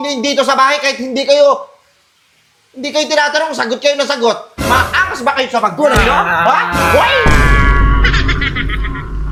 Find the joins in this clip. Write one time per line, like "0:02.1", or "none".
none